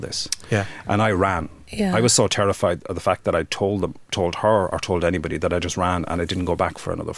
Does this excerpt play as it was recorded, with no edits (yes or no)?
yes